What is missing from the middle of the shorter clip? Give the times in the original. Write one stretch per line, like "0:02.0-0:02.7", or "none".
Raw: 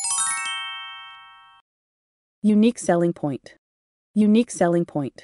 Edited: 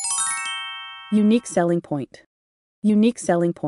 0:01.0-0:02.3